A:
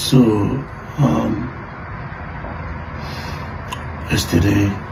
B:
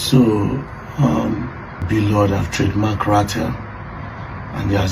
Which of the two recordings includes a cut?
B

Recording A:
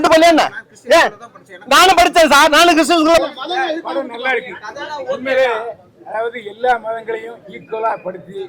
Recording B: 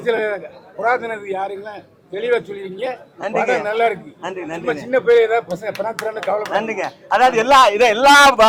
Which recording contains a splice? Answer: A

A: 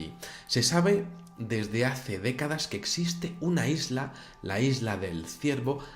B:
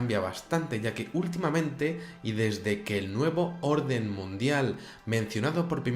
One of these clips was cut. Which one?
A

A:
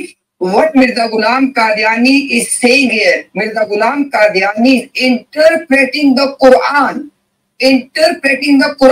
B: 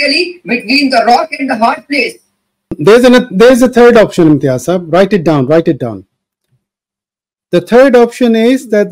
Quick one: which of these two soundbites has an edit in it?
B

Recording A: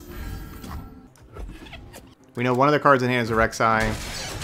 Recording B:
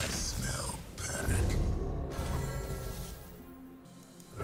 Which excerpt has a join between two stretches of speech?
A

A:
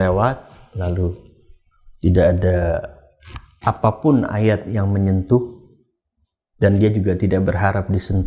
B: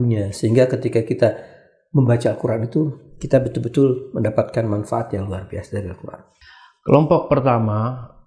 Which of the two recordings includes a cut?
B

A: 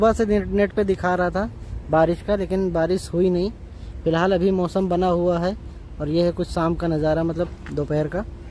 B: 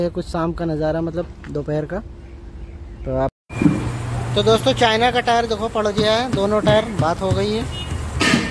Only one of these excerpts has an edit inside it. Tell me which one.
B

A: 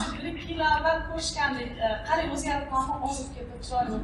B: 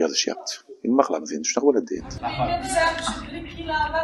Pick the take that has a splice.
B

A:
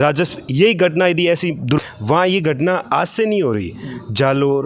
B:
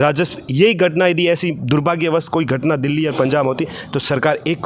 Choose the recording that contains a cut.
A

